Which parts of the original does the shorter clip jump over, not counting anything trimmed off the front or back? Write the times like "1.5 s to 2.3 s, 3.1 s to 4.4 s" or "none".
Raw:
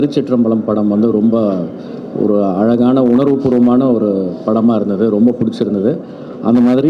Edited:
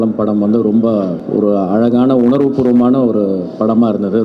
1.7 s to 2.1 s